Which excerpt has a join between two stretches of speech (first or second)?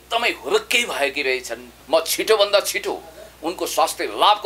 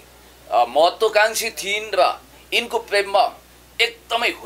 first